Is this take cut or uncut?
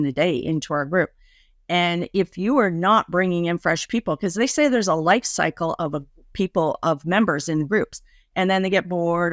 uncut